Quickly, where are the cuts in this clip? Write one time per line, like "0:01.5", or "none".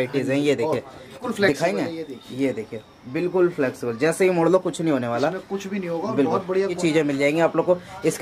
0:01.2
0:06.7